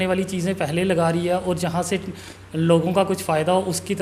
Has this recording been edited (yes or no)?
no